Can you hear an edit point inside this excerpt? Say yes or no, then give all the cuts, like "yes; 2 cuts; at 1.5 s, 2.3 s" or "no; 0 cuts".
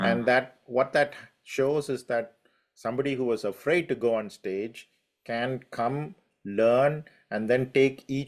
no; 0 cuts